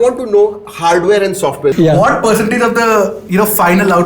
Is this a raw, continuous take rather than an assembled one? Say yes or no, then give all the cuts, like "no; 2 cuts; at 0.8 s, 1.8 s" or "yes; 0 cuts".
no; 1 cut; at 1.7 s